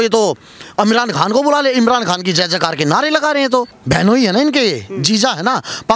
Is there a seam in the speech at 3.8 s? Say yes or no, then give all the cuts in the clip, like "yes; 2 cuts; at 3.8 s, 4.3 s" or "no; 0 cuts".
yes; 1 cut; at 3.8 s